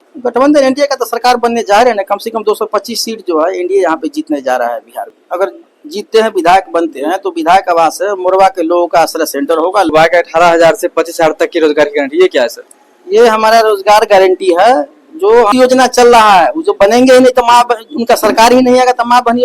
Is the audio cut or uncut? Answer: cut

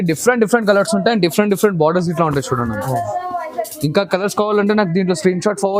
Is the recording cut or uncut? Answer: uncut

